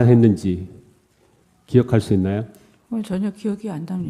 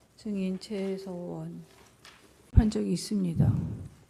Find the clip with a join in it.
first; 1 cut; at 2.5 s

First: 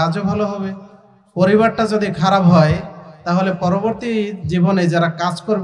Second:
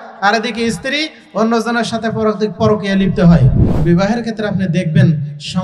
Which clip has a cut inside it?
second; 1 cut; at 3.6 s

